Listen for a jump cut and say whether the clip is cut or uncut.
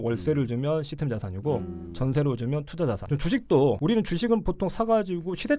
cut